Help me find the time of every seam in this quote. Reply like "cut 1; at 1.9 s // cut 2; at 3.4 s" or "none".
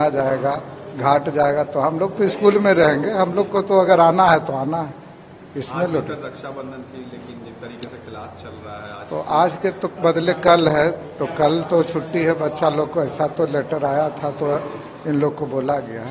none